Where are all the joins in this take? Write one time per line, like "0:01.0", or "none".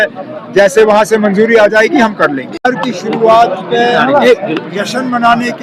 0:02.5